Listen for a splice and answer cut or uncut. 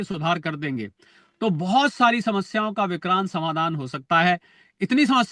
uncut